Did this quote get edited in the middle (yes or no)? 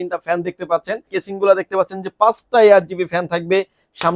yes